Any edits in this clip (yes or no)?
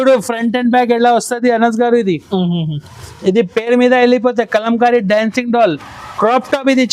no